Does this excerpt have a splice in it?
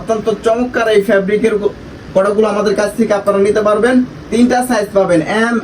no; 0 cuts

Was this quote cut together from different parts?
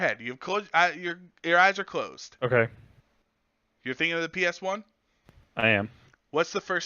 yes; 1 cut; at 2.2 s

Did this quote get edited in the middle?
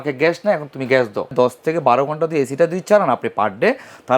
yes; 1 cut; at 1.3 s

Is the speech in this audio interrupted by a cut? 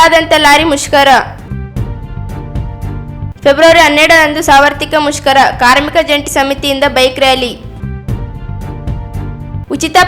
yes; 2 cuts; at 1.4 s, 3.0 s

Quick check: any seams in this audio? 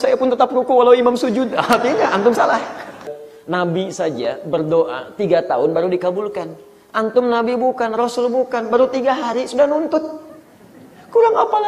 yes; 1 cut; at 3.1 s

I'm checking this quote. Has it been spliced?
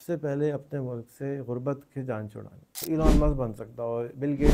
yes; 1 cut; at 2.7 s

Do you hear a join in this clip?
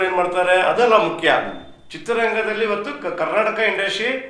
no; 0 cuts

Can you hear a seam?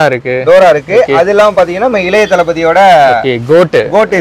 no; 0 cuts

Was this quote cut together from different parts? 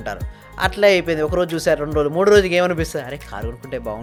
no; 0 cuts

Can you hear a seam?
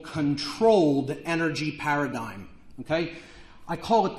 no; 0 cuts

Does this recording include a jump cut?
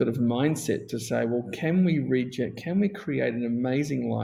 no; 0 cuts

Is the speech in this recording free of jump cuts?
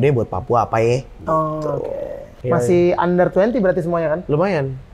no; 1 cut; at 2.3 s

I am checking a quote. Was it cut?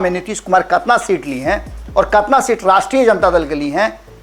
no; 0 cuts

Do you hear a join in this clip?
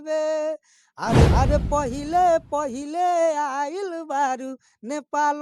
yes; 1 cut; at 1.3 s

